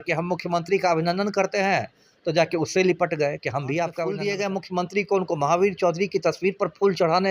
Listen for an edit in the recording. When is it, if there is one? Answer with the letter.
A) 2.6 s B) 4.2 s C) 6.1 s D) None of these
B